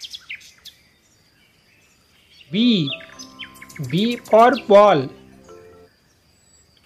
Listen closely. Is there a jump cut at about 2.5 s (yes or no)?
yes